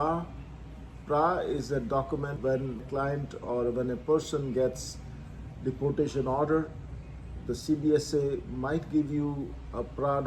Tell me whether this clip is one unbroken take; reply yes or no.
no